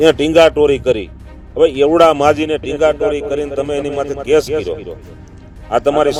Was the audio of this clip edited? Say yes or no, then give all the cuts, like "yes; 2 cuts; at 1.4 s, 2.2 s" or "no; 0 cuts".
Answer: no; 0 cuts